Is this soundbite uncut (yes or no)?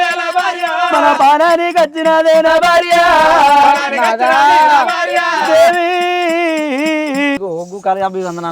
no